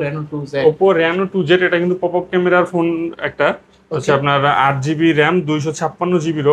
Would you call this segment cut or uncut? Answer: uncut